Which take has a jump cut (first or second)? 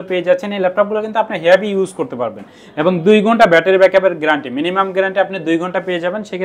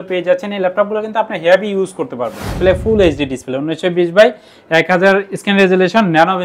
second